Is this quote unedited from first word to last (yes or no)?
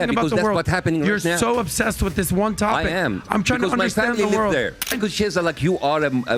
no